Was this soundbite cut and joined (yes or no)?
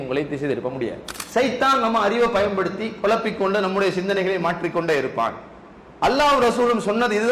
yes